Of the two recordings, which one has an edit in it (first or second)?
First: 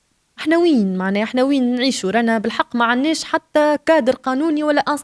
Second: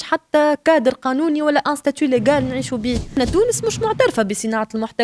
second